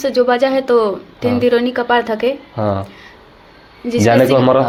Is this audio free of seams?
yes; 0 cuts

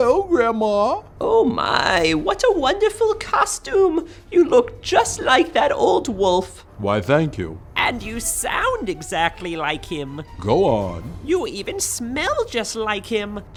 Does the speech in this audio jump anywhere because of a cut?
no; 0 cuts

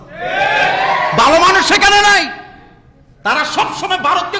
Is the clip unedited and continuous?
yes; 0 cuts

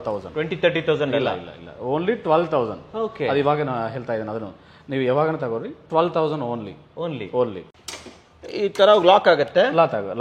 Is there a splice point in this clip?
yes; 1 cut; at 7.6 s

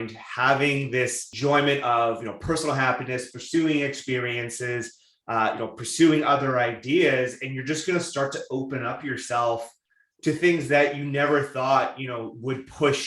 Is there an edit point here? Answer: yes; 1 cut; at 1.2 s

